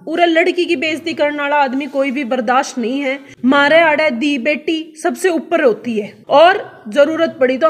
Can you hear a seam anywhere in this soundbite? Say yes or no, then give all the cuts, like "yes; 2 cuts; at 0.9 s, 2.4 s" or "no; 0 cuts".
yes; 2 cuts; at 3.3 s, 6.1 s